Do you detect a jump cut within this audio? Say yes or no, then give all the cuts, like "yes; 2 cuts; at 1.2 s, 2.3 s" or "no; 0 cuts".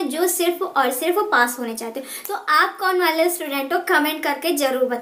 no; 0 cuts